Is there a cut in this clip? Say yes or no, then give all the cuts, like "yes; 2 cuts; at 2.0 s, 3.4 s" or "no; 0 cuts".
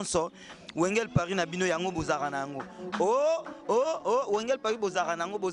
no; 0 cuts